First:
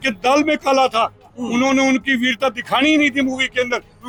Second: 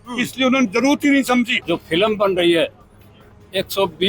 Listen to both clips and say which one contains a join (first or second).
second